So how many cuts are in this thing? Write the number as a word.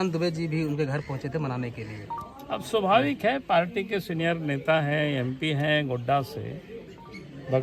zero